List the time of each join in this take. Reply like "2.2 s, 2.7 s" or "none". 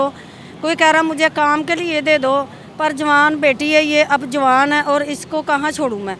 none